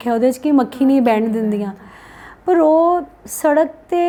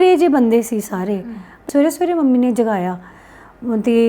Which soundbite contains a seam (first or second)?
second